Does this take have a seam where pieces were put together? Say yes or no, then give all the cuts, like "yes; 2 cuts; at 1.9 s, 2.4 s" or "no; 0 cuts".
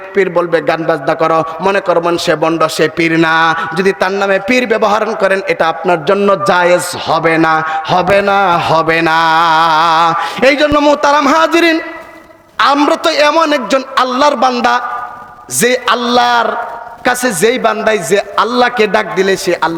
no; 0 cuts